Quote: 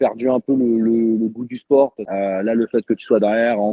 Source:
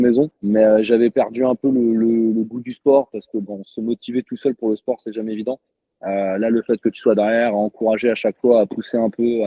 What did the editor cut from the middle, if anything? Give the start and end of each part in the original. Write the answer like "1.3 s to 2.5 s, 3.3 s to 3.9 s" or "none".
3.2 s to 6.0 s